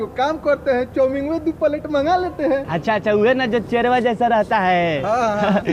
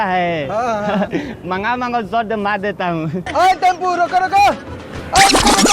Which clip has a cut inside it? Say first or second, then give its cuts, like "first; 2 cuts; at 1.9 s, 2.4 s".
second; 1 cut; at 3.2 s